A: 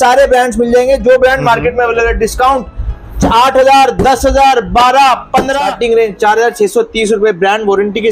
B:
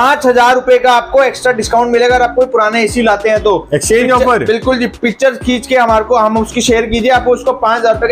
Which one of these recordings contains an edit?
A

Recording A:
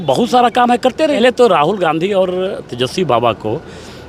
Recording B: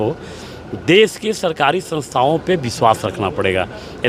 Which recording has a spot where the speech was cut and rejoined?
A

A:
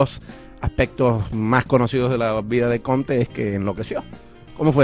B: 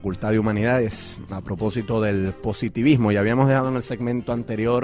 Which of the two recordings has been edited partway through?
B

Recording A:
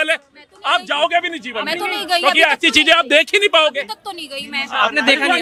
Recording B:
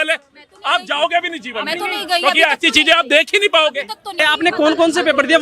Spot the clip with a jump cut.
B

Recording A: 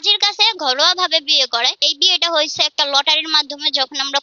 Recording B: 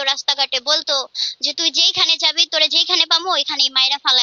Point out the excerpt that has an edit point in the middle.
A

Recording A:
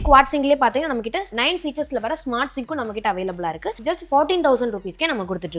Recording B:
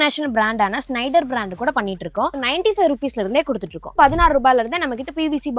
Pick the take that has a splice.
B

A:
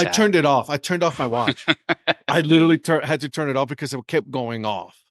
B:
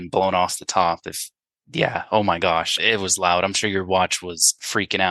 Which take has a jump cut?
B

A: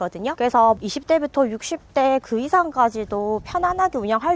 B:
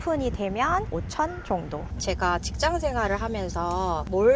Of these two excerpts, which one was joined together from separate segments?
B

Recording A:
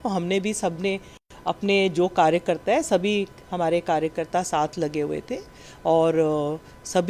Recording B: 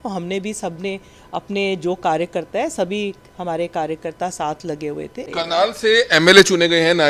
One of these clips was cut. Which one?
B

